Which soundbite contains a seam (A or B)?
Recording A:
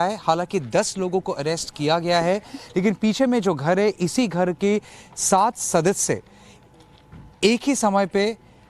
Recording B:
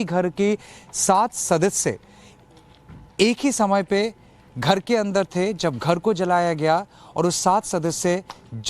B